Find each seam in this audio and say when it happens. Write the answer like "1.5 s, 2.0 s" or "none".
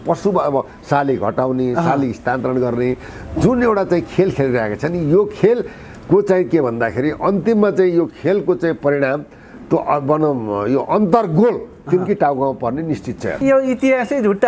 13.4 s